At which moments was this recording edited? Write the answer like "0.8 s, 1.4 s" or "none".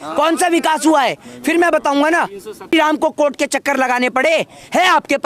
2.7 s

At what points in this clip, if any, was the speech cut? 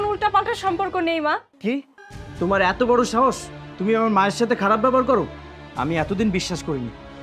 1.5 s

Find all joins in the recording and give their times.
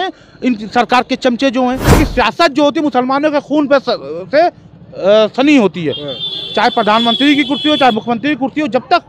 1.8 s

